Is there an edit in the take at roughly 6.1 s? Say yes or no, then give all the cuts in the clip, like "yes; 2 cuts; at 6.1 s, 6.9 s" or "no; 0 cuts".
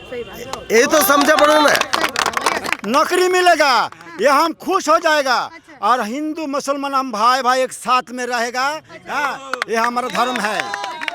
no; 1 cut; at 2.6 s